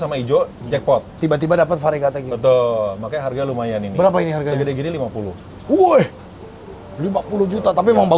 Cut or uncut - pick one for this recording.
uncut